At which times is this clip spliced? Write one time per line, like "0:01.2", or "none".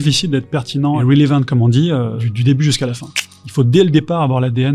0:01.0
0:02.2
0:03.3